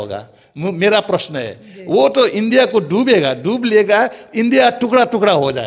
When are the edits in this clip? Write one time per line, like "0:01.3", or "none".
none